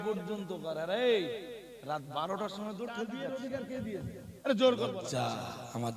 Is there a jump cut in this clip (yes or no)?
yes